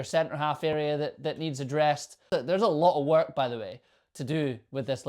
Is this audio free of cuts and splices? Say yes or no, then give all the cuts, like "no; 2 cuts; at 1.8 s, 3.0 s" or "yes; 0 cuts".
no; 1 cut; at 2.3 s